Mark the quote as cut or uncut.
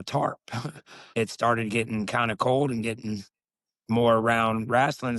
cut